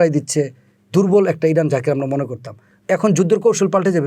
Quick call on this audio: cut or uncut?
cut